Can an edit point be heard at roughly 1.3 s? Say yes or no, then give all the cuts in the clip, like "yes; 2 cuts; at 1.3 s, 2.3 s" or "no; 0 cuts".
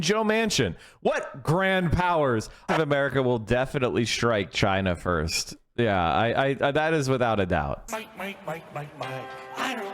no; 2 cuts; at 2.7 s, 7.9 s